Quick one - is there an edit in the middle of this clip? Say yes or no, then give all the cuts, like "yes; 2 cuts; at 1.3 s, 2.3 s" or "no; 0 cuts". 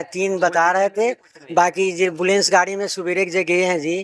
no; 0 cuts